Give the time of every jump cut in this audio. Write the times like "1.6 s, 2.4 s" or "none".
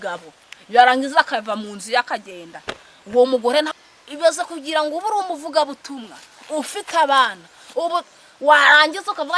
3.7 s